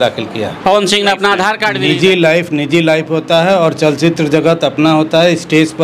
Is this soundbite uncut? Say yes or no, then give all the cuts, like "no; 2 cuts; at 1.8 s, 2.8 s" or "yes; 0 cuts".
no; 1 cut; at 1.7 s